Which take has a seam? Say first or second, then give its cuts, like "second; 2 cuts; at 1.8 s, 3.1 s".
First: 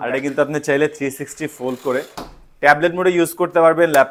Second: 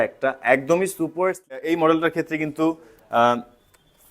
second; 1 cut; at 1.5 s